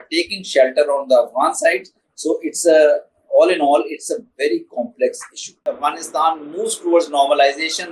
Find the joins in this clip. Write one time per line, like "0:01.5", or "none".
0:05.6